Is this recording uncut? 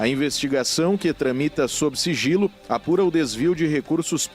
no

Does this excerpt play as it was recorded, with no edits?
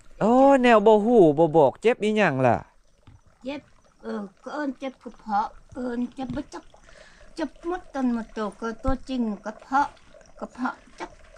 yes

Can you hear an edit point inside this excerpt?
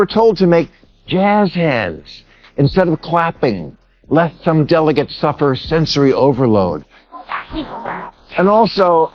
yes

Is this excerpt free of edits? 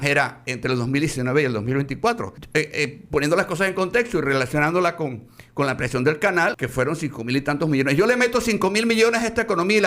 no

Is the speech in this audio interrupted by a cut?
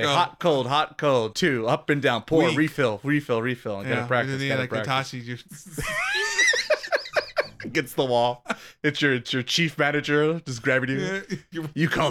yes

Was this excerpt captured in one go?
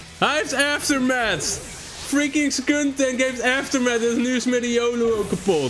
yes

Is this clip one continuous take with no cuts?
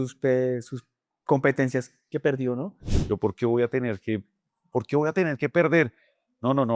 no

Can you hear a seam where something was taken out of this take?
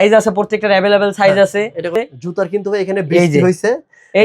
yes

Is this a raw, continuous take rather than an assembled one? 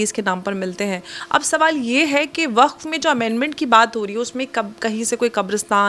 no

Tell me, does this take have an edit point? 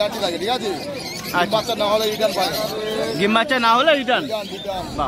no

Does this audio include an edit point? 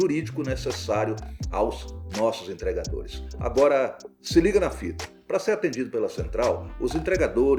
no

